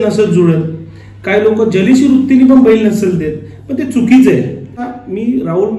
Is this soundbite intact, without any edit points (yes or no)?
no